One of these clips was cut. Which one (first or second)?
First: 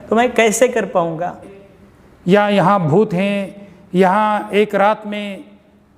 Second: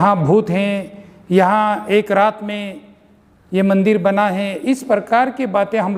first